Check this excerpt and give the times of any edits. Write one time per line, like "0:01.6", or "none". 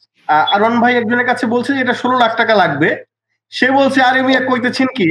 none